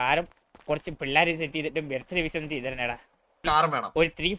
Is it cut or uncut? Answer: cut